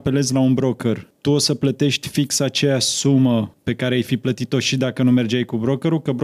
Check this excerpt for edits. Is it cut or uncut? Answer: cut